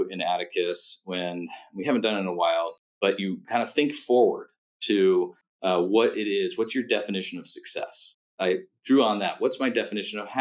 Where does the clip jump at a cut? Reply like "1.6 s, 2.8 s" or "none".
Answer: 2.8 s, 5.4 s, 8.3 s